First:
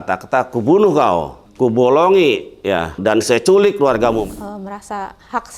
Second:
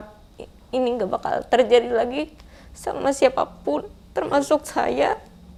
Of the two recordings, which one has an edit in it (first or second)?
first